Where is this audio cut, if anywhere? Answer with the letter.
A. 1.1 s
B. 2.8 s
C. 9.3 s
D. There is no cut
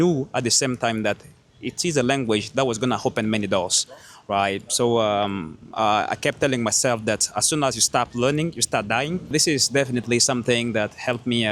C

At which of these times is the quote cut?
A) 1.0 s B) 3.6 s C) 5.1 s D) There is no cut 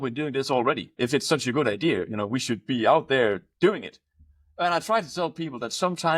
A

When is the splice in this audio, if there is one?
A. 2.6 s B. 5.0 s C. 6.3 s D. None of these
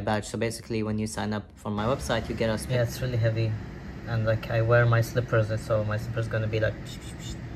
A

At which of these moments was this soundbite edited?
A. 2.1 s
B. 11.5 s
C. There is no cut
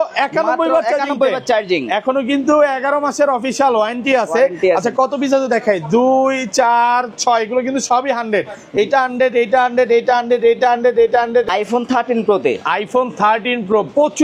B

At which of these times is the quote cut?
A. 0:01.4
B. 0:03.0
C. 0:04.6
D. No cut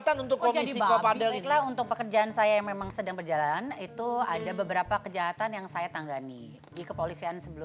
A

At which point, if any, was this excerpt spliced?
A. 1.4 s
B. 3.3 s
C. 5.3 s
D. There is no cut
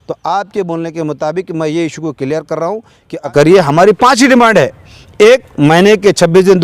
B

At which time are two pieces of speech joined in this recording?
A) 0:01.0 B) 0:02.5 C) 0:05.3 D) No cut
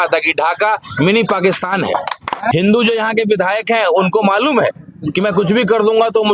B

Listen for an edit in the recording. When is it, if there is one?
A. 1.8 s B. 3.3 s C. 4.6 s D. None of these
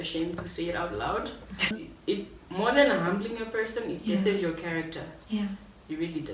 A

